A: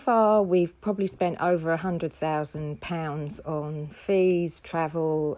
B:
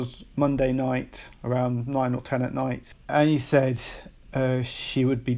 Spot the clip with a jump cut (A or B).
B